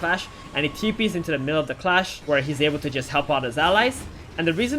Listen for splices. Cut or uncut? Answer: cut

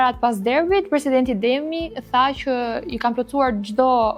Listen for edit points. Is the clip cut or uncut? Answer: uncut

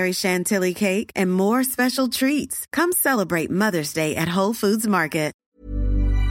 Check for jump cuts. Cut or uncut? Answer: cut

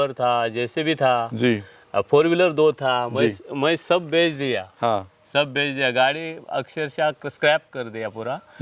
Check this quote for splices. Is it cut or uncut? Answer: uncut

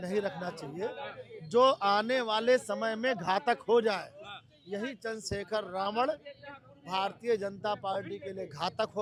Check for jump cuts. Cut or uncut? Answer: uncut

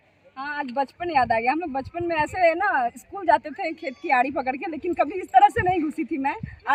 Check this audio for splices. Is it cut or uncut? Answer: uncut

